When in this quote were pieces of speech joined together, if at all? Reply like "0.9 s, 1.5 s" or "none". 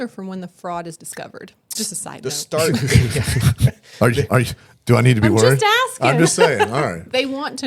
1.7 s